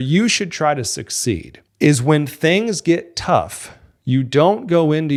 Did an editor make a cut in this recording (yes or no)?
no